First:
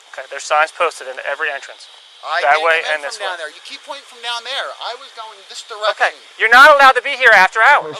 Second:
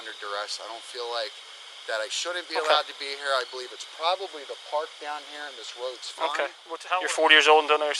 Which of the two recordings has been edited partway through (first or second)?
second